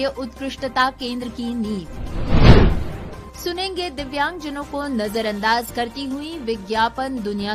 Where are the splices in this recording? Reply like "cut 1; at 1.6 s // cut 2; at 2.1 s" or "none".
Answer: none